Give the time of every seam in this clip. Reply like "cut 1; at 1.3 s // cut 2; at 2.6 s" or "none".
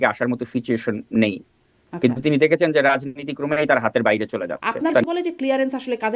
cut 1; at 5.0 s